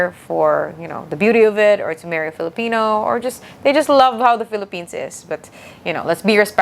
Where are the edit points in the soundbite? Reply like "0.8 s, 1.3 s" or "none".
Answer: none